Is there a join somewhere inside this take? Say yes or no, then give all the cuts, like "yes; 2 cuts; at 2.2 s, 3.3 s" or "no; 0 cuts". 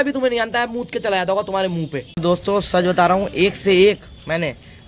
no; 0 cuts